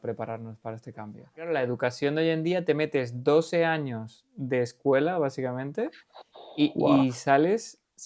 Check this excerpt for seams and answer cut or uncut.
cut